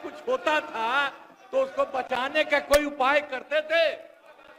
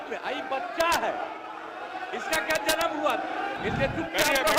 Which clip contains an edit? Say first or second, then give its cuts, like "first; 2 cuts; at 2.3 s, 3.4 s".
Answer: second; 1 cut; at 3.6 s